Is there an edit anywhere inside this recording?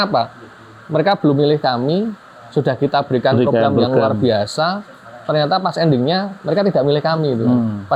no; 0 cuts

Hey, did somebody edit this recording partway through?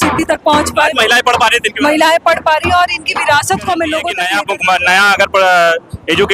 yes; 1 cut; at 4.2 s

